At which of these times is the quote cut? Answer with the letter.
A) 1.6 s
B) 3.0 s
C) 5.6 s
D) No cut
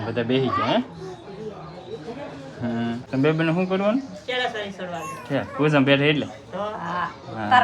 B